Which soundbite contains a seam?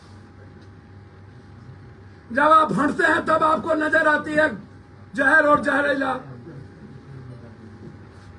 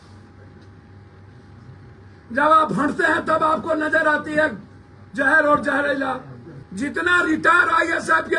second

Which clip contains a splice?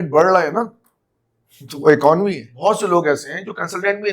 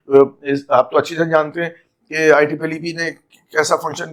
first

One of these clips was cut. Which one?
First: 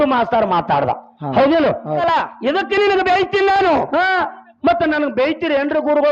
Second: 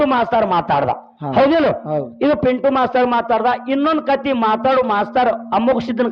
first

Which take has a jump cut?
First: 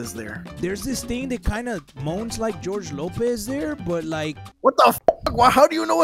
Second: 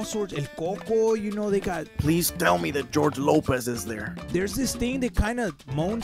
second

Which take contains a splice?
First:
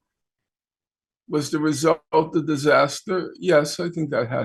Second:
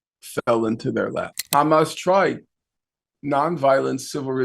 second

